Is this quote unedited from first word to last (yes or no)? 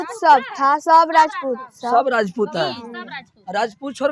yes